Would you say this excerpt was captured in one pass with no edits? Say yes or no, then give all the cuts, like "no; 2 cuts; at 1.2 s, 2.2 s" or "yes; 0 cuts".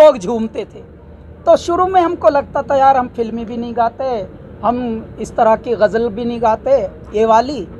yes; 0 cuts